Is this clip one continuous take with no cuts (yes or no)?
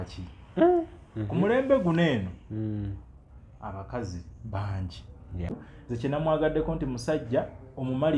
no